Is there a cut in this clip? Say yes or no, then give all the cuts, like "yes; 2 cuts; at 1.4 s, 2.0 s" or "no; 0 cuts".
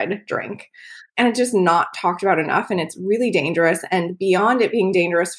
yes; 1 cut; at 1.0 s